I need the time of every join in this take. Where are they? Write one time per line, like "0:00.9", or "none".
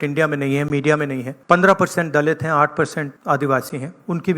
0:01.3
0:03.1